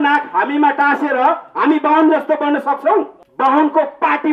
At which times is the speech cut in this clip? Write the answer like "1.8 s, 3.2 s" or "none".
3.2 s